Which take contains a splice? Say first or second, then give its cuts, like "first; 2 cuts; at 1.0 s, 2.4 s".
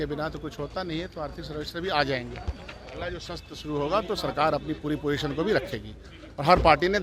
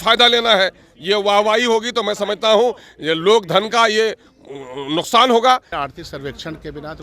second; 1 cut; at 5.7 s